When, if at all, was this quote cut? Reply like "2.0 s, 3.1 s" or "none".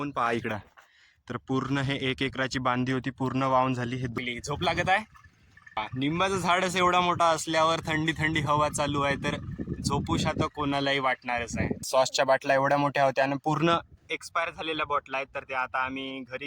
4.2 s, 5.8 s, 11.9 s